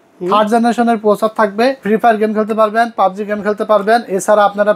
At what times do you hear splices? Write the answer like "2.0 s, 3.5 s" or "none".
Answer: 1.8 s

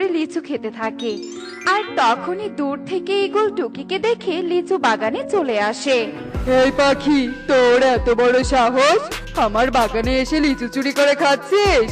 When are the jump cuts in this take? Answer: none

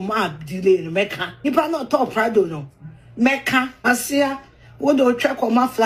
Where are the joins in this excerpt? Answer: 1.5 s, 3.9 s

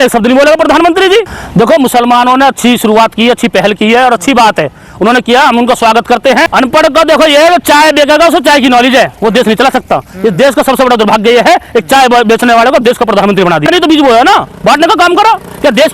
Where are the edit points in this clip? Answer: 1.4 s, 6.5 s, 13.7 s

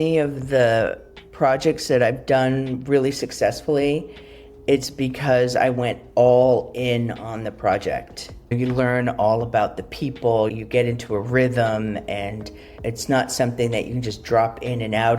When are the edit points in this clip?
8.5 s, 10.5 s

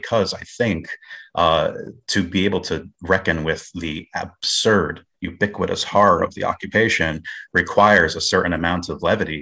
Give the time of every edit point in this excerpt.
none

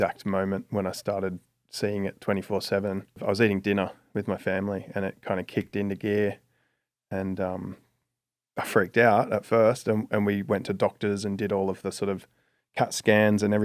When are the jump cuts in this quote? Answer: 3.2 s

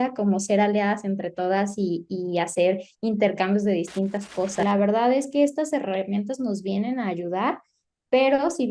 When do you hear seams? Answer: 4.6 s

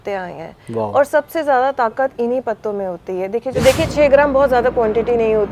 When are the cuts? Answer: 3.6 s

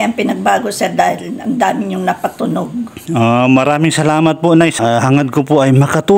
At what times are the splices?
4.8 s

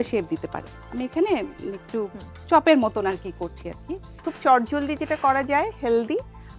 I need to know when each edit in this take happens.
4.1 s

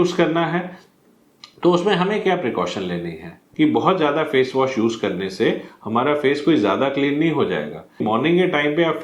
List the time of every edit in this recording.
3.4 s, 8.0 s

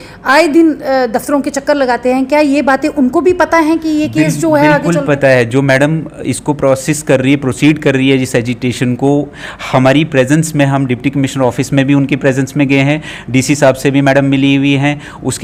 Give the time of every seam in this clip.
none

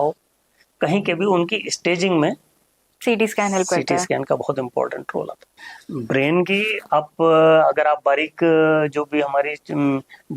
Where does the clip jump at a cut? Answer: 5.6 s

